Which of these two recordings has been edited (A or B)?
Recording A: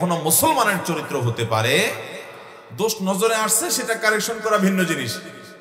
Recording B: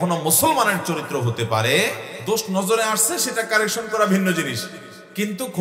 B